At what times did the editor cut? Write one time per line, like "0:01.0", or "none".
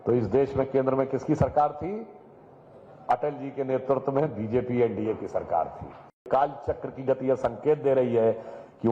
0:06.2